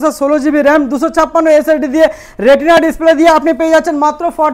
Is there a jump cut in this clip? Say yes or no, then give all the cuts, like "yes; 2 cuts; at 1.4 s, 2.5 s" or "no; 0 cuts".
no; 0 cuts